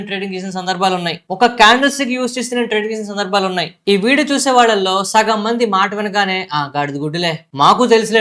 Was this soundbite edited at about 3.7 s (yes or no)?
yes